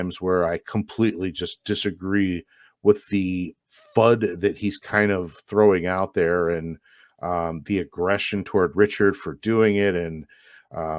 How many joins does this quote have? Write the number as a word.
zero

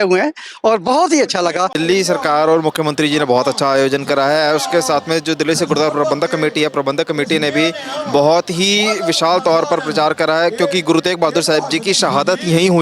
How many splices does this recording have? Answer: one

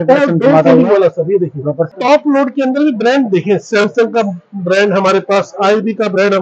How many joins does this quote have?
one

